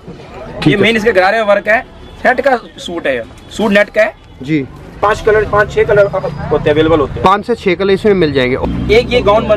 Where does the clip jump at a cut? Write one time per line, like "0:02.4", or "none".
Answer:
0:05.0
0:08.6